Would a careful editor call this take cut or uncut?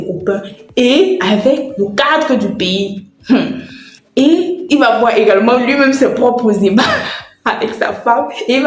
uncut